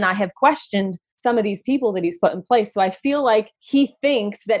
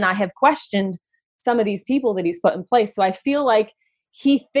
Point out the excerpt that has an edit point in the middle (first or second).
first